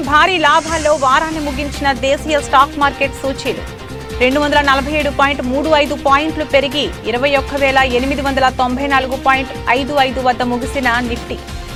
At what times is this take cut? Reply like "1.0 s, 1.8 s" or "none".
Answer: none